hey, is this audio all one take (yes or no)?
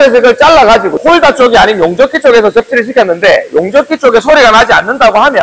yes